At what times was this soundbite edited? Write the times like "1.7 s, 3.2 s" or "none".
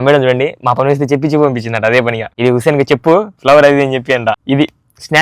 2.3 s, 4.4 s